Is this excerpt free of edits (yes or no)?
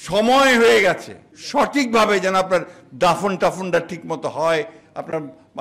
no